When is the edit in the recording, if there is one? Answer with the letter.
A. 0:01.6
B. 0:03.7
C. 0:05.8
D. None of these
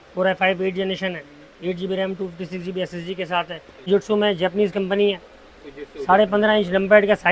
B